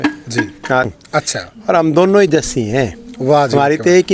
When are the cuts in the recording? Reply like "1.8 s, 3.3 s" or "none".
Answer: 0.9 s

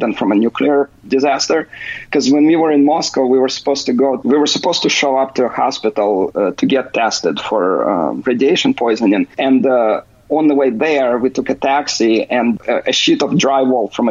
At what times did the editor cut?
4.2 s, 9.3 s, 12.6 s

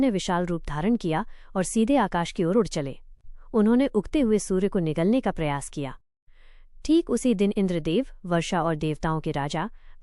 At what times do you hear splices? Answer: none

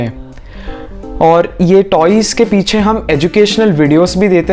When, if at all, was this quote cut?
none

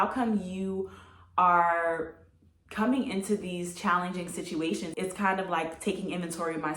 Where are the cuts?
4.9 s

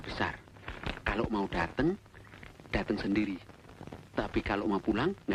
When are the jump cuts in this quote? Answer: none

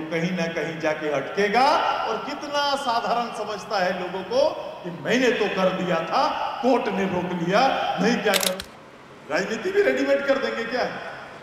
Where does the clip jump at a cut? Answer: 8.5 s

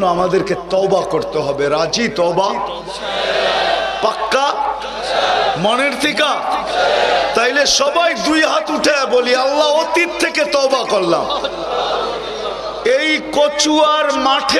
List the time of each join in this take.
none

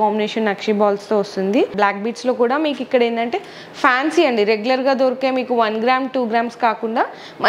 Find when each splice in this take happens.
1.7 s

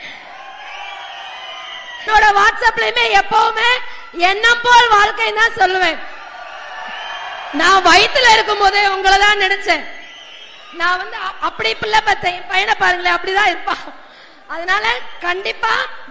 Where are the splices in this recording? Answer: 2.1 s

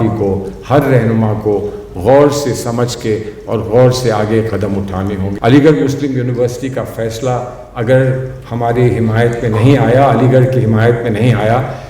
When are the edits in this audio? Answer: 5.3 s

